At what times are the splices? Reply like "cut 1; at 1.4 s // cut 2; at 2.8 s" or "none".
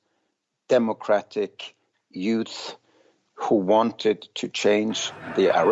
none